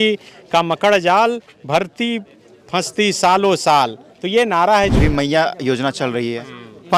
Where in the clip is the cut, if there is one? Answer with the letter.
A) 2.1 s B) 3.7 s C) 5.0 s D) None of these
C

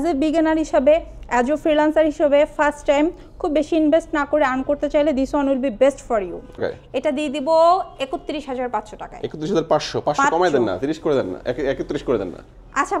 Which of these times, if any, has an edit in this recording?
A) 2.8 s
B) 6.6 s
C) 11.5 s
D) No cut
B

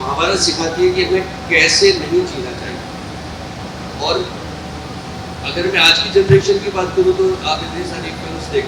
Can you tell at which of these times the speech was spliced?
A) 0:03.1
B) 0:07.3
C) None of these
C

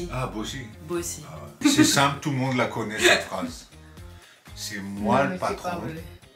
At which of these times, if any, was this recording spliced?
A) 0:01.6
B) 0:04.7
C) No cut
A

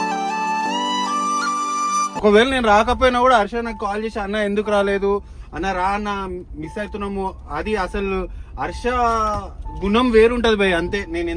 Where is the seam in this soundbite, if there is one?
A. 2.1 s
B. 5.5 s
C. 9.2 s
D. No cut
A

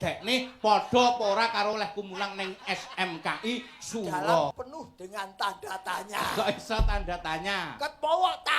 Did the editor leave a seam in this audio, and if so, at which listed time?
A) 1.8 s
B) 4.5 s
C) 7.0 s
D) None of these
B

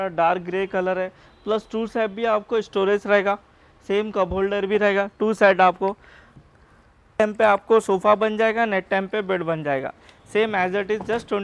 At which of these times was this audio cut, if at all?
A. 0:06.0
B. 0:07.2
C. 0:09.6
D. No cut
B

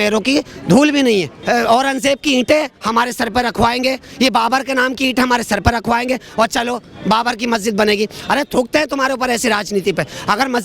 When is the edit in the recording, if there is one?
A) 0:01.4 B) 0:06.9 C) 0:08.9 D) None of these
A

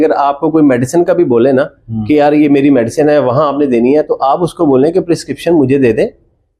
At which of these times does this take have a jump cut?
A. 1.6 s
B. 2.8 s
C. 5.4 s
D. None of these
D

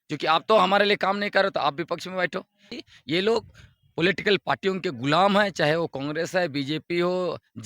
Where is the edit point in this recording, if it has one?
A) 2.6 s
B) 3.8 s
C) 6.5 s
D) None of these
A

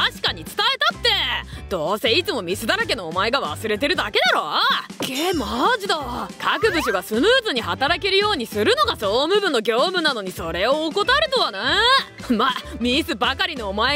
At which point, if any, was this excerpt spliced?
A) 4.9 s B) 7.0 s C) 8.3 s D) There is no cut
A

